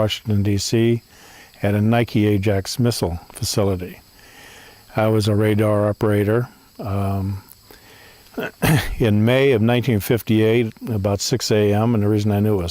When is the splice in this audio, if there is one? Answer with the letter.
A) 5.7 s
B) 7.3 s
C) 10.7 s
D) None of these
C